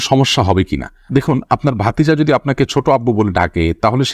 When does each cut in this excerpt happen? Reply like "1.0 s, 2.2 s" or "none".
none